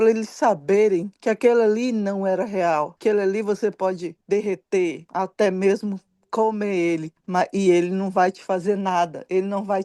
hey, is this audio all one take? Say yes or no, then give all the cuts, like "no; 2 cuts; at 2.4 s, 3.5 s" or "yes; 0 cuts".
no; 5 cuts; at 1.1 s, 2.9 s, 4.1 s, 5.0 s, 7.1 s